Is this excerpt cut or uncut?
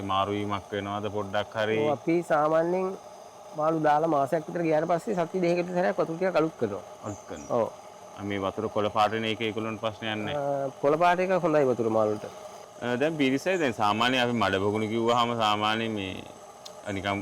uncut